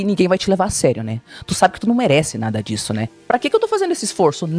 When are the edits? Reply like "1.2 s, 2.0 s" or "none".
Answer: 3.1 s